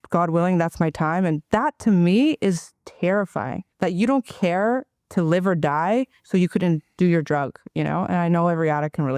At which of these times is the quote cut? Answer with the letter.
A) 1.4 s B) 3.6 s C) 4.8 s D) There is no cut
B